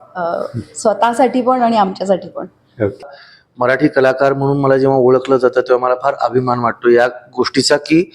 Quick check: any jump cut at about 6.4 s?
no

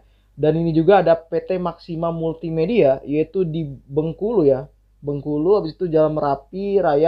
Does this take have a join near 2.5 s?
no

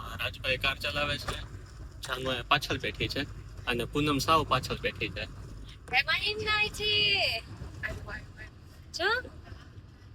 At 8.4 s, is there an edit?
no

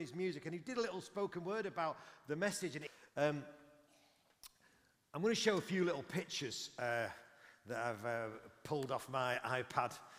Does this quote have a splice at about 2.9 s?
yes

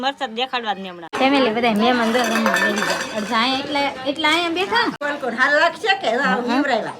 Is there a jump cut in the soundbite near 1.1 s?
yes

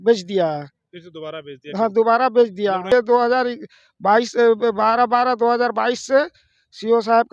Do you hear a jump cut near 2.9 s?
yes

